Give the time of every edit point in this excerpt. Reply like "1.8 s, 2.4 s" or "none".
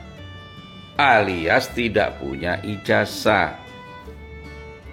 none

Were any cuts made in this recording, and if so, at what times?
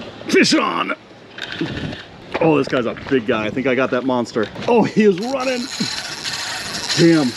2.1 s, 4.6 s

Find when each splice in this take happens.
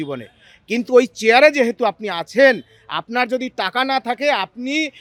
none

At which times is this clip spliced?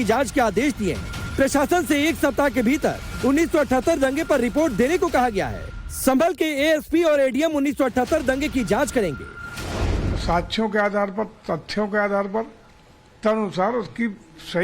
4.2 s

